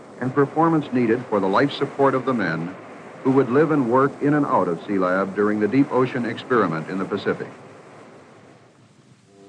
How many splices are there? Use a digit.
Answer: 1